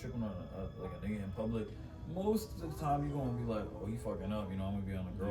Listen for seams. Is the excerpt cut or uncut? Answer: uncut